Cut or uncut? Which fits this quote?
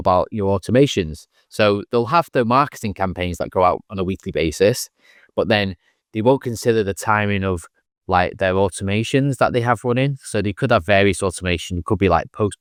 uncut